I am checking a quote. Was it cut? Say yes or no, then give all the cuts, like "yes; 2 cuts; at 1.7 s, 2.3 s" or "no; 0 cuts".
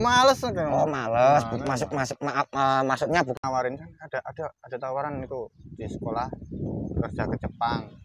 yes; 1 cut; at 3.3 s